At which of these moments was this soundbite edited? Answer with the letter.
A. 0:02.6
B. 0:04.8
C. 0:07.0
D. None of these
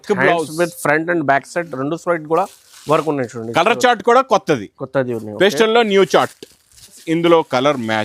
C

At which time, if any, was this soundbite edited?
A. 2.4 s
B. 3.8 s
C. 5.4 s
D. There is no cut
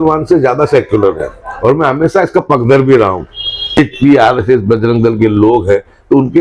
B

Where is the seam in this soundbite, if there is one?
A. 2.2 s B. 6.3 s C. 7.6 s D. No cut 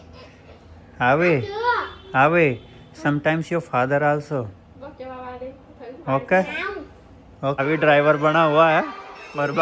C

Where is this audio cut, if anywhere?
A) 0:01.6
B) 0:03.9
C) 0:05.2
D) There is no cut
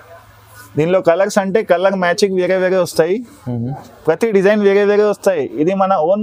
D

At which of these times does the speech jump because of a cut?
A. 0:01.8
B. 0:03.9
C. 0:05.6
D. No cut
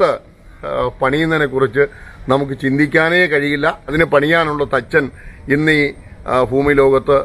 B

